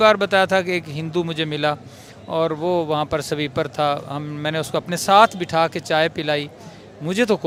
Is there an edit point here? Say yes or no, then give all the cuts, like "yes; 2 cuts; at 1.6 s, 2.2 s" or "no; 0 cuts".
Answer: no; 0 cuts